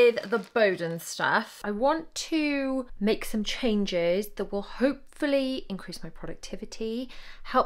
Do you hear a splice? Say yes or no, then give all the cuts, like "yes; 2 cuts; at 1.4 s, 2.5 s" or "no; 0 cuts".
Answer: yes; 2 cuts; at 1.6 s, 2.9 s